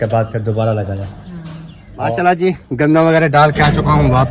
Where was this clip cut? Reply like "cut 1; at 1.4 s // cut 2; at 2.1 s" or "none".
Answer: cut 1; at 2.1 s